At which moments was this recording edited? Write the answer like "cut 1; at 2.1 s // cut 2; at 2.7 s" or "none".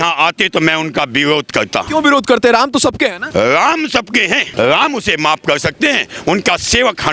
cut 1; at 1.9 s // cut 2; at 3.2 s // cut 3; at 4.5 s

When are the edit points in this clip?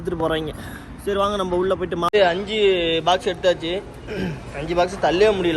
cut 1; at 2.1 s

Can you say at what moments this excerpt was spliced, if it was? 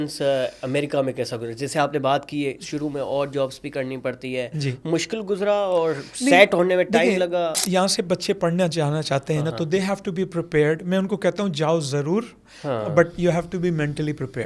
none

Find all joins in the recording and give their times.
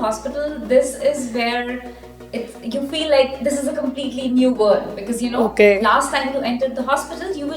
none

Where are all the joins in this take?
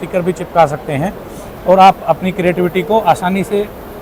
none

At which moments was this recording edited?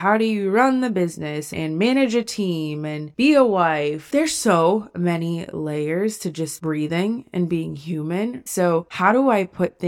cut 1; at 4.1 s // cut 2; at 8.9 s

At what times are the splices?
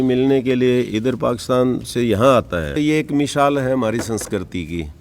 cut 1; at 2.7 s

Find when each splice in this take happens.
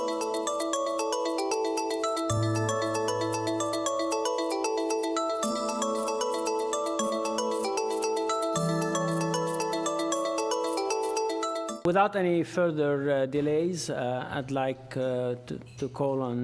cut 1; at 14.5 s

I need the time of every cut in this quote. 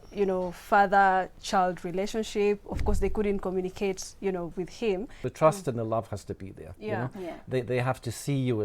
cut 1; at 5.2 s

